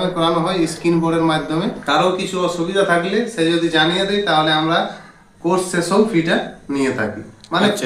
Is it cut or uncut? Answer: cut